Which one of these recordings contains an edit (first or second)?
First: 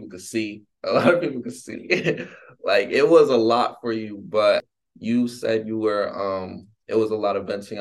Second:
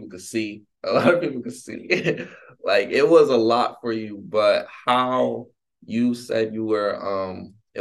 first